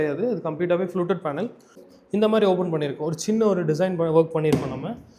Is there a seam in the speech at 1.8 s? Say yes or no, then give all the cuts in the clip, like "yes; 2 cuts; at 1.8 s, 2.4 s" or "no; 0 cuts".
yes; 1 cut; at 1.8 s